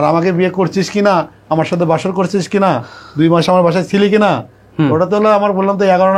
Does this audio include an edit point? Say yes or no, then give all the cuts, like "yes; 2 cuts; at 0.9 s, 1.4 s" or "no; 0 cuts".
no; 0 cuts